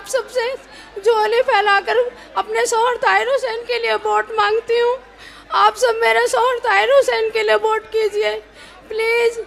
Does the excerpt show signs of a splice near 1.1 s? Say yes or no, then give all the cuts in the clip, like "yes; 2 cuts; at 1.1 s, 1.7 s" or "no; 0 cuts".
no; 0 cuts